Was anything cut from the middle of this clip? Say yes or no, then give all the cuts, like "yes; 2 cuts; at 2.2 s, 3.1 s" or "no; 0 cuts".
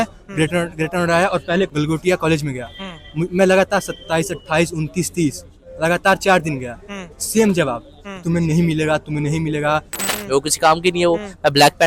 yes; 2 cuts; at 1.7 s, 10.0 s